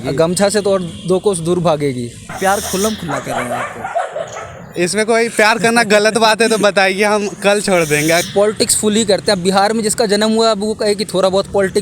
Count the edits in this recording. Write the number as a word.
two